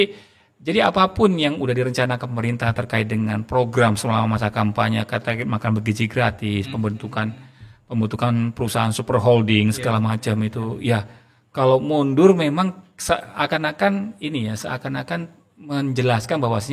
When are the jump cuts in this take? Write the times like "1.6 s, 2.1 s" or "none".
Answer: none

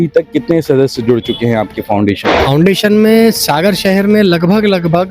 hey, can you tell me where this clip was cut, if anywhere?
2.3 s

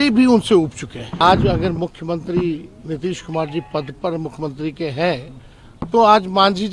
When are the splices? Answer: 1.2 s

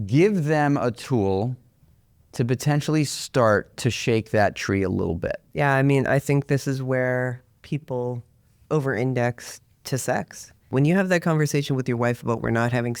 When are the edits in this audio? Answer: 5.4 s, 10.7 s

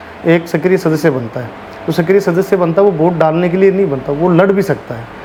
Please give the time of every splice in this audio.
none

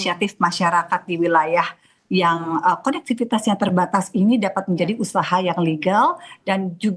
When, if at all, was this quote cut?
none

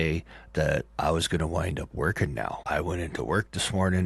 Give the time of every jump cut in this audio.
2.6 s

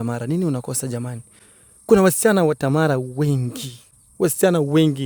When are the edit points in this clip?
none

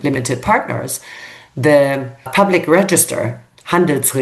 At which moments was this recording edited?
2.3 s

